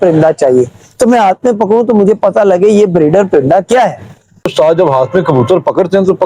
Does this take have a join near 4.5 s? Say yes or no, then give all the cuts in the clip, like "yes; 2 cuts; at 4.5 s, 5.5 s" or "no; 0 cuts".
yes; 1 cut; at 4.5 s